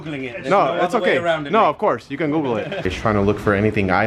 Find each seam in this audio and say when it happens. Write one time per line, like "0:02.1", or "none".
0:02.9